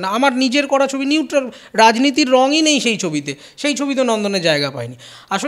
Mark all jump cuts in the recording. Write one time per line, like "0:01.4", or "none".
none